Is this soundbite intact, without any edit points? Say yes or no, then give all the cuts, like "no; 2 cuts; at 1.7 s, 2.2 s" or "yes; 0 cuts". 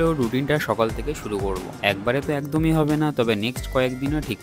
yes; 0 cuts